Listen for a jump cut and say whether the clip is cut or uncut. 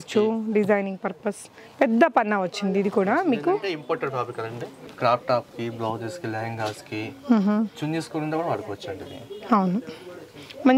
cut